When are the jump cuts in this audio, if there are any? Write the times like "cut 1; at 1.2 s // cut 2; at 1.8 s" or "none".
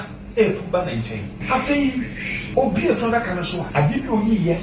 cut 1; at 1.3 s // cut 2; at 2.4 s // cut 3; at 3.6 s